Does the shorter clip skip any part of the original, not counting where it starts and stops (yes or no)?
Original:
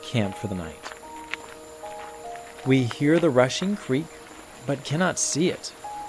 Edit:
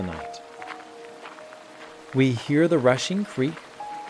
no